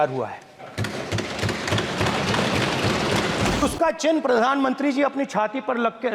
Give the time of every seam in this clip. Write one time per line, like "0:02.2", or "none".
0:03.6